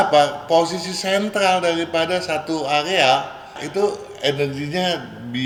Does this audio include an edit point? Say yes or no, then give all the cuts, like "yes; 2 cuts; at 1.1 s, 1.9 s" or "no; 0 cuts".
no; 0 cuts